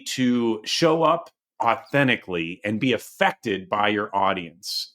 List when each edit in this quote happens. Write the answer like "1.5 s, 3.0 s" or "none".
none